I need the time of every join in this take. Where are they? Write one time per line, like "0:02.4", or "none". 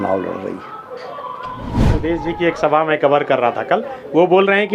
0:01.7